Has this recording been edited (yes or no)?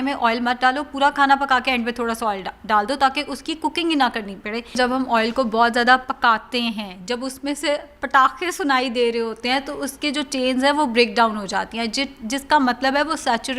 yes